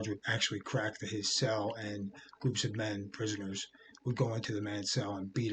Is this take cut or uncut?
uncut